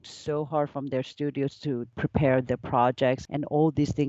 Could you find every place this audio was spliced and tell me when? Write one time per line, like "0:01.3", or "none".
0:01.9
0:03.2